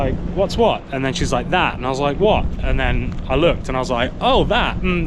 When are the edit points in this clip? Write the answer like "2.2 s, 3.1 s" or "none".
none